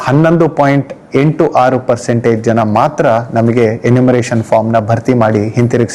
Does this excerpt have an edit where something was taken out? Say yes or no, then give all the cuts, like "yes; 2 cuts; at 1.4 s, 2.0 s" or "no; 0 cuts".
no; 0 cuts